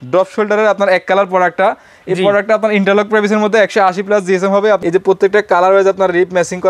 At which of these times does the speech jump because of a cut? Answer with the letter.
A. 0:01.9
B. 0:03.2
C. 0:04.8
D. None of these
C